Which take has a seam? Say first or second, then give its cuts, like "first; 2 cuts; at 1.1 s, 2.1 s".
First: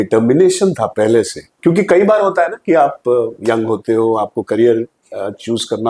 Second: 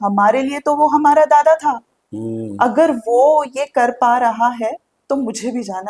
first; 2 cuts; at 1.4 s, 3.3 s